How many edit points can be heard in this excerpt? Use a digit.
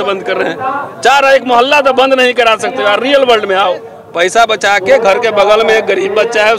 1